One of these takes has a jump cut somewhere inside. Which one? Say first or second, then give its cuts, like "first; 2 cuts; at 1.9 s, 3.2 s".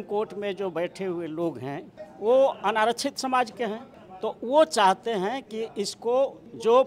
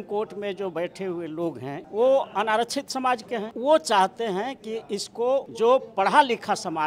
second; 3 cuts; at 1.8 s, 3.5 s, 5.5 s